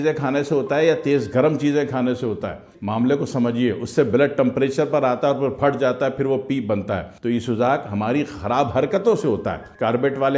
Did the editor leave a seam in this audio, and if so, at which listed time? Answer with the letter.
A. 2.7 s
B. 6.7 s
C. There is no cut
C